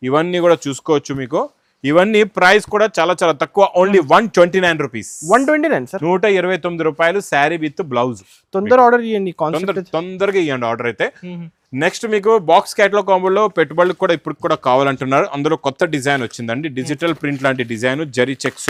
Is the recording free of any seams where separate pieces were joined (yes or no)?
yes